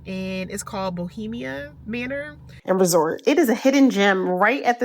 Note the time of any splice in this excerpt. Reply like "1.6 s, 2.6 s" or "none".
2.5 s